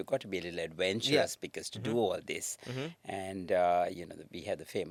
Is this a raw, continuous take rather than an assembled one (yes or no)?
yes